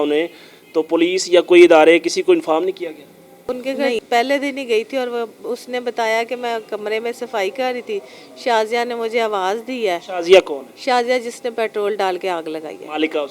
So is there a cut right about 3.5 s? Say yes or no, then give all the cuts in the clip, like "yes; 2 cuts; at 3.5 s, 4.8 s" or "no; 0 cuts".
yes; 1 cut; at 3.5 s